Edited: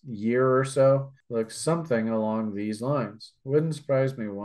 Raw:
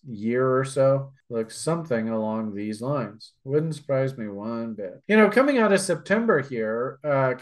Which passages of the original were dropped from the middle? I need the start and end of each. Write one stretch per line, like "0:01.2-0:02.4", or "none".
none